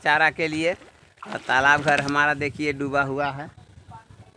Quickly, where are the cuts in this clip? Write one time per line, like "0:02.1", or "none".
none